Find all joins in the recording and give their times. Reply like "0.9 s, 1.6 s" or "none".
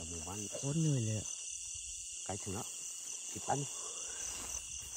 none